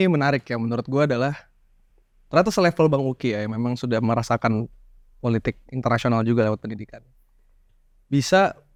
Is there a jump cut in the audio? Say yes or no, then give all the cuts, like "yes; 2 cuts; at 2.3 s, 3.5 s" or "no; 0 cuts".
no; 0 cuts